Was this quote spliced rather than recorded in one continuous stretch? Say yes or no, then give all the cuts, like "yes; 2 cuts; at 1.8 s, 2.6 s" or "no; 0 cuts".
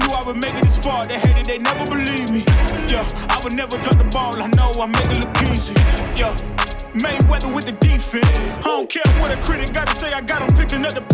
no; 0 cuts